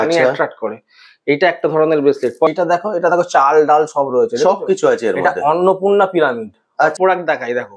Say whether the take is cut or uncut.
cut